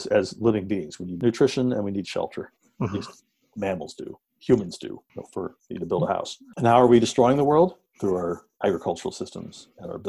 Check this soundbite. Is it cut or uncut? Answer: uncut